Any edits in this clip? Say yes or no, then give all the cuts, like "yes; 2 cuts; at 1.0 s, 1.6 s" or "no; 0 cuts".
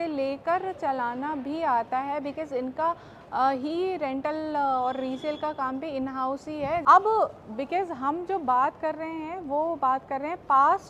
yes; 1 cut; at 6.8 s